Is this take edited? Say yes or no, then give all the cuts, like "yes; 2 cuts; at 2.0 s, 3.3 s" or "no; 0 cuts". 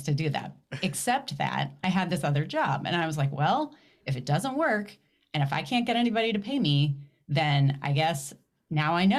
no; 0 cuts